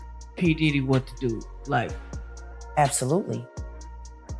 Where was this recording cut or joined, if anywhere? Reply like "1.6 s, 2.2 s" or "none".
3.4 s